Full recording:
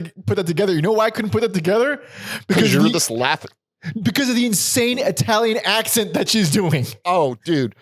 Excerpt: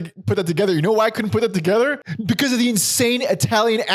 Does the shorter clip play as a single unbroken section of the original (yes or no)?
no